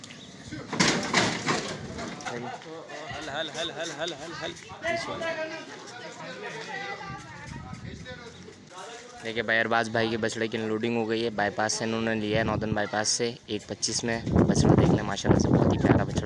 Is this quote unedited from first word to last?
no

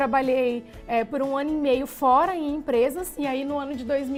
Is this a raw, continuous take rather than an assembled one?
yes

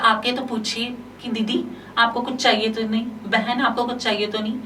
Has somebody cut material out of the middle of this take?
no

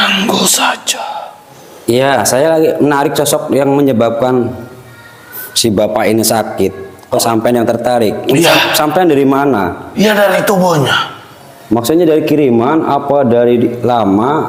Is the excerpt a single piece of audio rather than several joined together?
yes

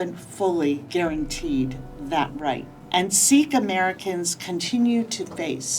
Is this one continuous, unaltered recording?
no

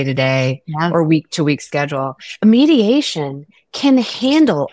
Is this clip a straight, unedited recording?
no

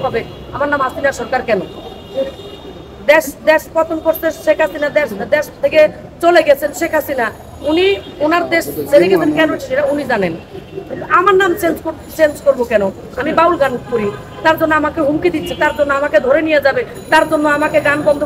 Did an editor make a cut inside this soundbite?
no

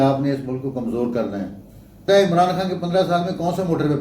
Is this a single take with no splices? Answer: no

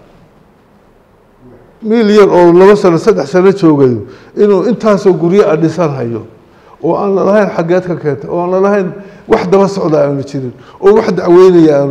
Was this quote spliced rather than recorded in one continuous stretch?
yes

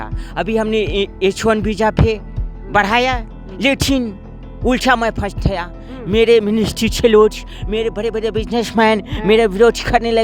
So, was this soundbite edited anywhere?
no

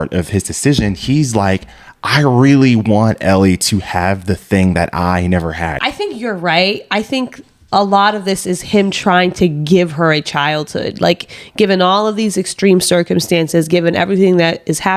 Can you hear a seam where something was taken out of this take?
yes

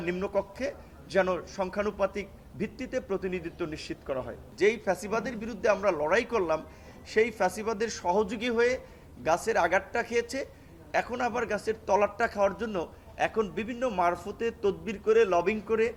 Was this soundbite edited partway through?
no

